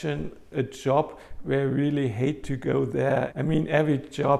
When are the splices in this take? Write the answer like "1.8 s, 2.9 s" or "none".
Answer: 3.3 s

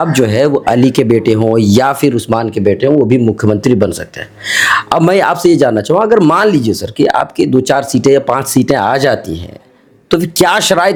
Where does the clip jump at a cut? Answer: none

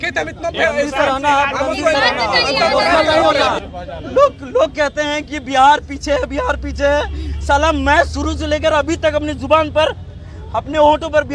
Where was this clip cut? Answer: 3.6 s

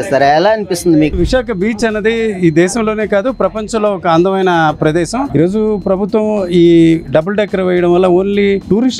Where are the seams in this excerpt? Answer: 1.1 s, 5.3 s

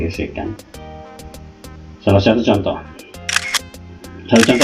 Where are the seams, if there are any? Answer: none

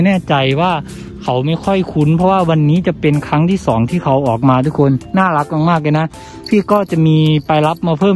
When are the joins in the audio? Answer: none

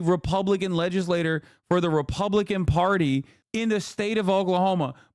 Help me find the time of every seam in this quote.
3.4 s

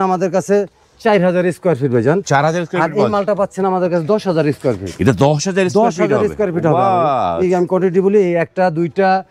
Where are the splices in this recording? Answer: none

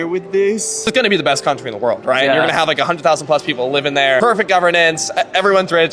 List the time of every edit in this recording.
0.9 s, 4.2 s

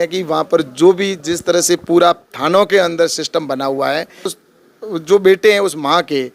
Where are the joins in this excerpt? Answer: 4.4 s

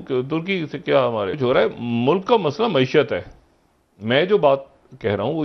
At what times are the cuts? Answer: 1.3 s

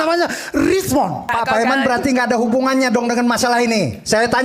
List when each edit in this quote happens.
1.3 s

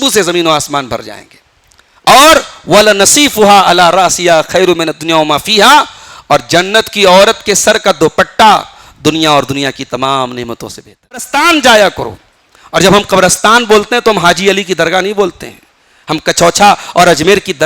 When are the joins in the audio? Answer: 11.3 s

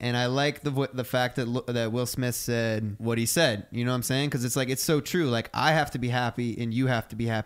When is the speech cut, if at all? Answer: 2.9 s

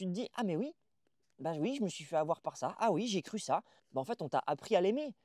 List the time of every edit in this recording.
3.7 s

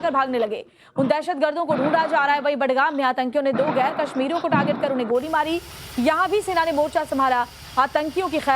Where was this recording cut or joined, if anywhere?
3.1 s

